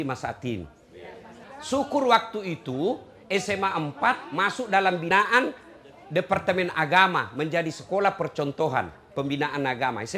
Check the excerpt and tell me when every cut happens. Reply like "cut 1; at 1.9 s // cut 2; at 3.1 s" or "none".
cut 1; at 1.4 s // cut 2; at 5.1 s